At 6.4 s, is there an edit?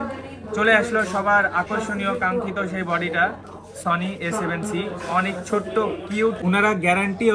yes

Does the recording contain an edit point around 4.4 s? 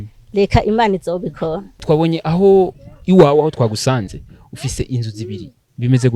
no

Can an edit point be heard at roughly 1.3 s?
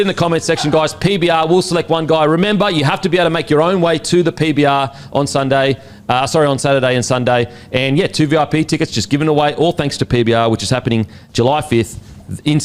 no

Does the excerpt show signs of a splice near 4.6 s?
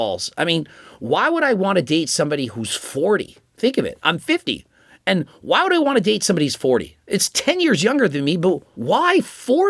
no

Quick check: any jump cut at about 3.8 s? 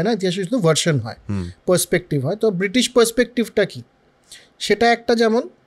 no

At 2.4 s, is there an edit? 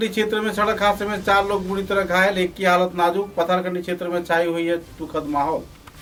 no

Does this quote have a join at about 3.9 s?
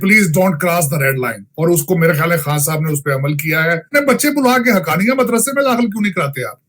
yes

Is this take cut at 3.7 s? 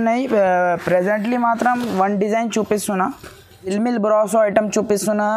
yes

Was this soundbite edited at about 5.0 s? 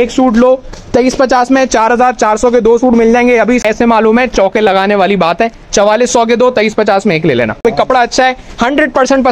no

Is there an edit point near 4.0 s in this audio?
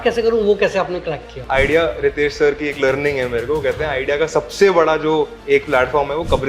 no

